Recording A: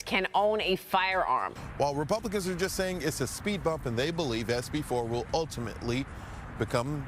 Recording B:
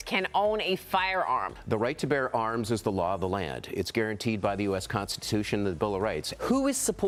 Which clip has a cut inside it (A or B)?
A